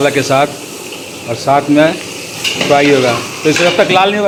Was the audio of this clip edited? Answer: no; 0 cuts

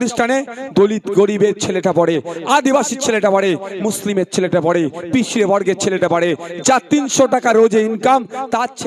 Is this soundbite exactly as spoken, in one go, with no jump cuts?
yes; 0 cuts

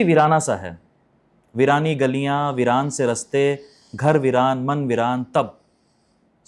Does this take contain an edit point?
no; 0 cuts

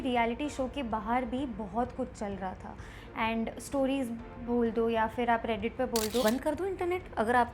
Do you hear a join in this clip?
yes; 1 cut; at 6.2 s

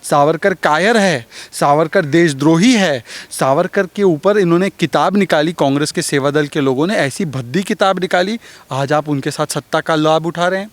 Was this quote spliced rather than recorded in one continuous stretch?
no; 0 cuts

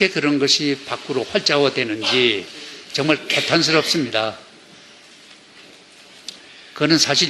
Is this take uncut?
yes; 0 cuts

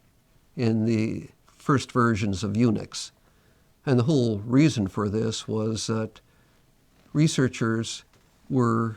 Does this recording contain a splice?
no; 0 cuts

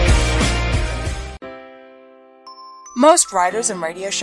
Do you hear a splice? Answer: yes; 1 cut; at 1.4 s

